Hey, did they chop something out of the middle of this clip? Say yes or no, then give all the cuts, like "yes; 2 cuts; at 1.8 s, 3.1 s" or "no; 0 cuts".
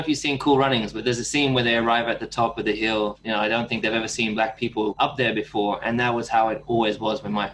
yes; 3 cuts; at 1.0 s, 3.2 s, 5.0 s